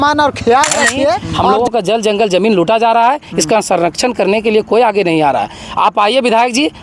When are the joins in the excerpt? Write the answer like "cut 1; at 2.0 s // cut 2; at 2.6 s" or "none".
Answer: cut 1; at 1.3 s